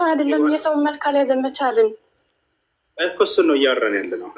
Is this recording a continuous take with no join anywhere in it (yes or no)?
yes